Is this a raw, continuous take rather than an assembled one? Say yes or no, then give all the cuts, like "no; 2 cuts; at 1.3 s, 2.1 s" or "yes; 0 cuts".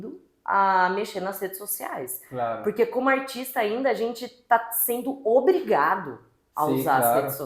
yes; 0 cuts